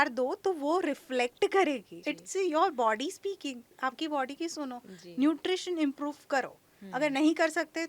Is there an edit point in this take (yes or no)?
yes